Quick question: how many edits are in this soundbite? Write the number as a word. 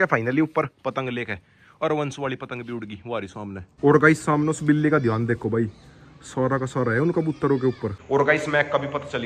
two